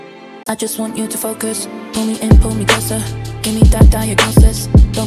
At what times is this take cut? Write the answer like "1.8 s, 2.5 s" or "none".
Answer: none